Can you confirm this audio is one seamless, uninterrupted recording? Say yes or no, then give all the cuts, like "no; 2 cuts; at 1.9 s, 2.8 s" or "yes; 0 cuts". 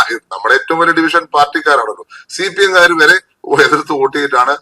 yes; 0 cuts